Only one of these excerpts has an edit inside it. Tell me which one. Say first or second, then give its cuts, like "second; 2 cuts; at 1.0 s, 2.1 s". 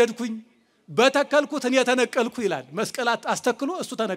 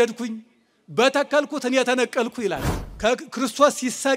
second; 1 cut; at 2.7 s